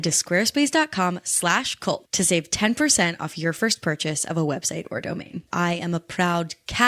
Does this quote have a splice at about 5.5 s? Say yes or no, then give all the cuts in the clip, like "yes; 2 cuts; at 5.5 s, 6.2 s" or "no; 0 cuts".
yes; 1 cut; at 5.5 s